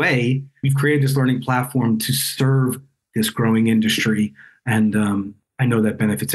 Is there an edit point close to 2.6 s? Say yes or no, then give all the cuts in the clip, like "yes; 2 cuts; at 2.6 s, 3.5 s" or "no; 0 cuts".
no; 1 cut; at 5.4 s